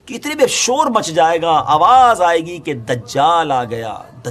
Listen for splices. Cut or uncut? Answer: uncut